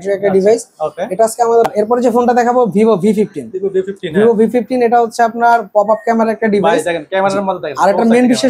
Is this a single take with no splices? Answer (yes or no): no